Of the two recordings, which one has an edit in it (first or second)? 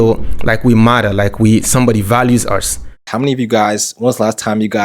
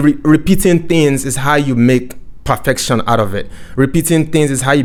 first